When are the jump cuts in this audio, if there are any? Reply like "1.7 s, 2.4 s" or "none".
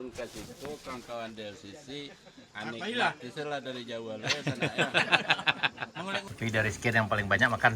6.3 s